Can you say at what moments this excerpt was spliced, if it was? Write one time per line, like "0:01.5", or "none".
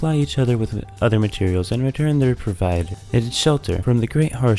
0:03.0
0:03.8